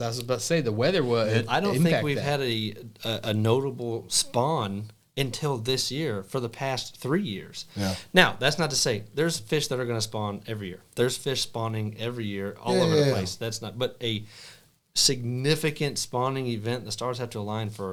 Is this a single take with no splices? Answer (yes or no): yes